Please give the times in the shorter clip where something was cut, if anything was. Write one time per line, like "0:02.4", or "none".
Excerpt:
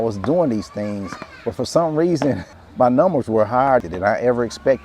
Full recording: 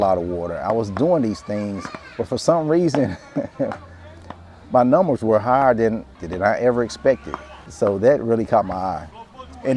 0:02.5
0:03.8

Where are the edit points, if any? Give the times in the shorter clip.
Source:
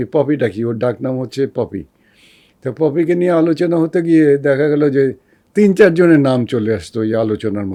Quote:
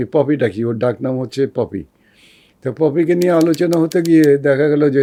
none

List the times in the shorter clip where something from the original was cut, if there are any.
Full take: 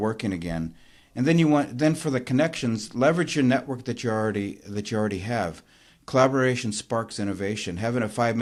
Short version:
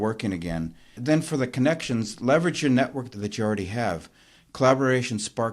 0:01.0
0:03.1

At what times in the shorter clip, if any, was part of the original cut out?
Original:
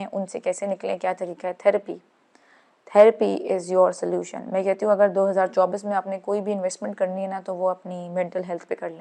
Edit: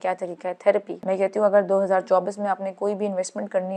0:00.9

